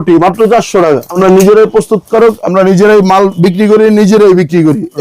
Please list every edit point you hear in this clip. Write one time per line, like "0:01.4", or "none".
0:01.1